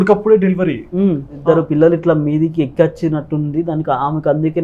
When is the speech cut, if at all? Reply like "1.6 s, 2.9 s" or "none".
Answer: 1.4 s